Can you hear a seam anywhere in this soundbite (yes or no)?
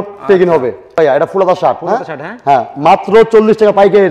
yes